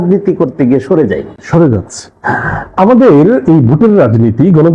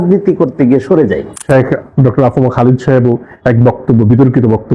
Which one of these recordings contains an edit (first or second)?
second